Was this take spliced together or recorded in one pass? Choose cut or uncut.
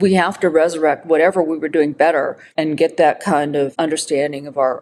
cut